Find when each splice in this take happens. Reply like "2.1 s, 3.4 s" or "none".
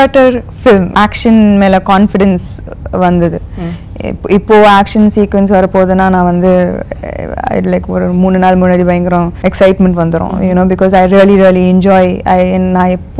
0.9 s, 9.3 s